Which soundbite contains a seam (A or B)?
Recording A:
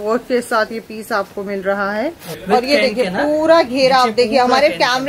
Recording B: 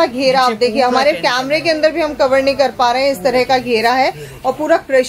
A